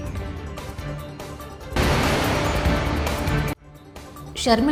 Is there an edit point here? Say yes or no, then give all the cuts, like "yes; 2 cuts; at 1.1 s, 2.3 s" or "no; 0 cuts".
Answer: no; 0 cuts